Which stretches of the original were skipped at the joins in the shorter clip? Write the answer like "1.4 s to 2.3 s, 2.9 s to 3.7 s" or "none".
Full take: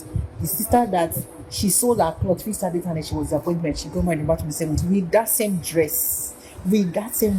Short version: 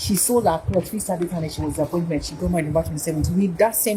none